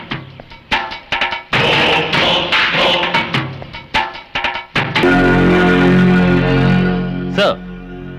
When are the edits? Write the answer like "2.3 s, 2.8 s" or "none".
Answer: 5.0 s